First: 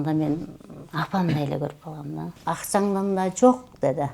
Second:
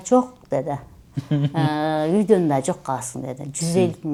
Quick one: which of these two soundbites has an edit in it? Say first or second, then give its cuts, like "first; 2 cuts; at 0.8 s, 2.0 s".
first; 1 cut; at 2.3 s